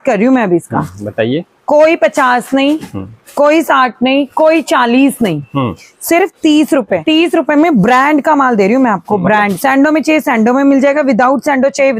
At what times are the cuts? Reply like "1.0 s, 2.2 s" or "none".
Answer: 7.0 s, 9.5 s